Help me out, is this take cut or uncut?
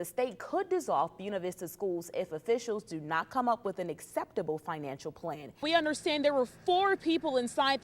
cut